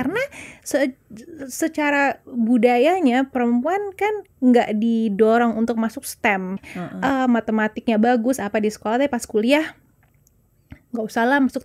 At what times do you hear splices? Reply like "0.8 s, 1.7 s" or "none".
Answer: 6.7 s